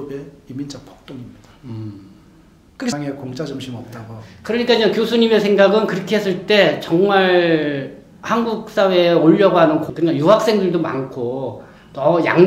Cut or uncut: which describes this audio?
cut